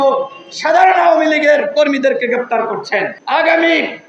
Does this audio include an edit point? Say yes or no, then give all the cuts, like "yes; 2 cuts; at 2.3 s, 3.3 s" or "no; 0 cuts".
yes; 1 cut; at 3.1 s